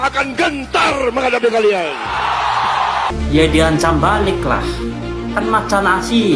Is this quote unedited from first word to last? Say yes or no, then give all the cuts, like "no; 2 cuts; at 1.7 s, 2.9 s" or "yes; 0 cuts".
no; 1 cut; at 3.1 s